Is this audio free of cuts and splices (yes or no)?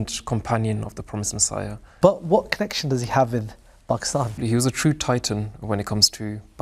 no